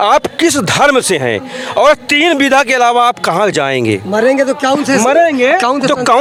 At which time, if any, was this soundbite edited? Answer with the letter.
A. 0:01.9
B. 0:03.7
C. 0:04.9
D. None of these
D